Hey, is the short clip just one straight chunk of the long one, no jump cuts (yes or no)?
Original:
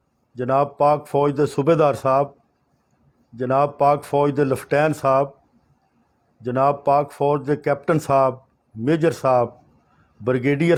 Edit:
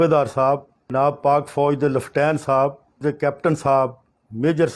no